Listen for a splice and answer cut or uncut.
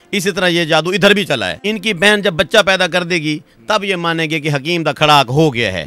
cut